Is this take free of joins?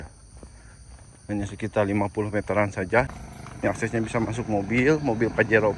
no; 1 cut; at 3.2 s

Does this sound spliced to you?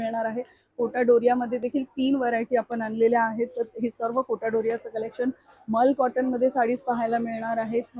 no; 0 cuts

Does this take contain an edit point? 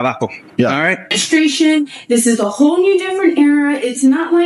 yes; 1 cut; at 1.1 s

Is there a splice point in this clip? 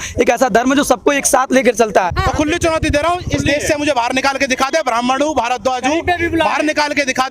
yes; 1 cut; at 2.1 s

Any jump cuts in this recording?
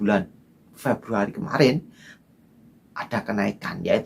yes; 1 cut; at 2.1 s

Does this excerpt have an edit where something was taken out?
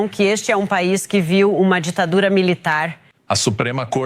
yes; 1 cut; at 3.1 s

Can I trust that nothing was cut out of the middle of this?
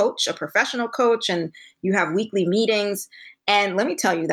yes; 0 cuts

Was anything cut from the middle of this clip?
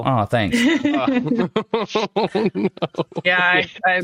no; 0 cuts

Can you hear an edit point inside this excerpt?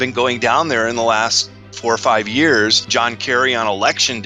yes; 1 cut; at 2.8 s

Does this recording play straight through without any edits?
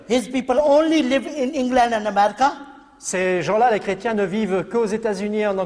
yes; 0 cuts

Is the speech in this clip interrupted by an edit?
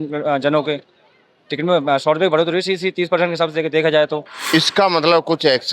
yes; 1 cut; at 4.3 s

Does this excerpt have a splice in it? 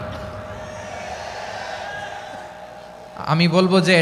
no; 0 cuts

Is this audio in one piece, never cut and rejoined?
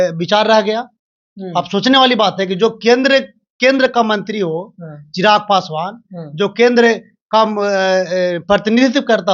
yes; 0 cuts

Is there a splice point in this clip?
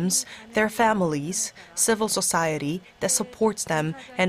no; 0 cuts

